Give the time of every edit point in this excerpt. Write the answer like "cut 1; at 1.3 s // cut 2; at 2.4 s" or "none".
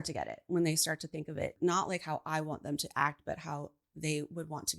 cut 1; at 1.5 s